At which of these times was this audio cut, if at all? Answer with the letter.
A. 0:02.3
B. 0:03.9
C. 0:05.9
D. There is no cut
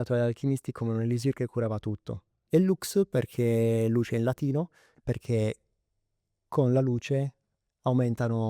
A